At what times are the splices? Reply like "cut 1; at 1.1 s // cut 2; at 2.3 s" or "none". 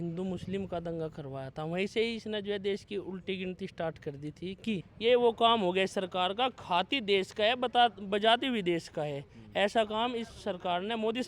cut 1; at 4.9 s